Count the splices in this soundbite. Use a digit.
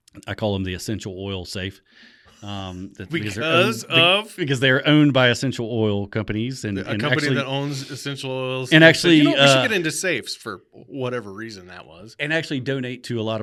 0